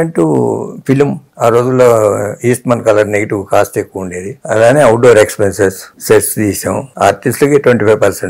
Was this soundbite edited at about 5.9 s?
no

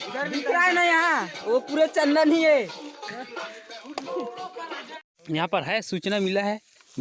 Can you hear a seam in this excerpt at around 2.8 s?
no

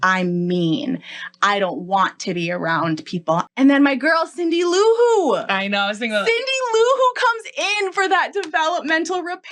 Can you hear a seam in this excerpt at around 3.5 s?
yes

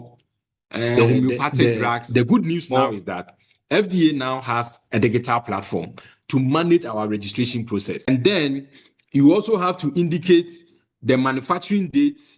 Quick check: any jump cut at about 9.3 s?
no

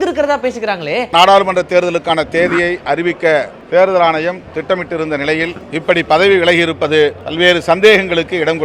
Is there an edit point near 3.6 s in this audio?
yes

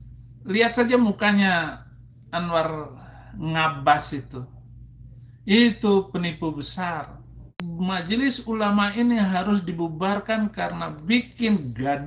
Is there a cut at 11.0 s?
no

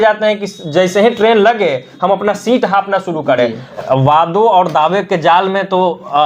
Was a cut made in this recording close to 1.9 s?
no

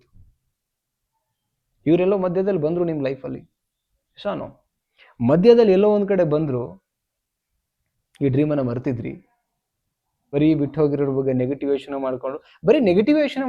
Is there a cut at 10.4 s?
yes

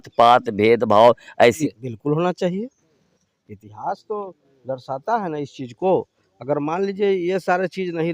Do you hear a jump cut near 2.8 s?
no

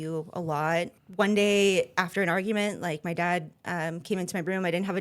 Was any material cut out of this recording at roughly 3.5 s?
no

